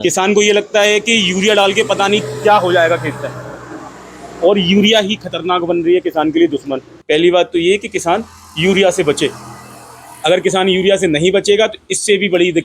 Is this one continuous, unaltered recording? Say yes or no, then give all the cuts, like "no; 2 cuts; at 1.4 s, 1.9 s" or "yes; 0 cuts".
no; 1 cut; at 6.9 s